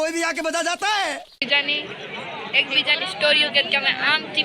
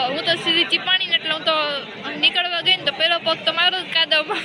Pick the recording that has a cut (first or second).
first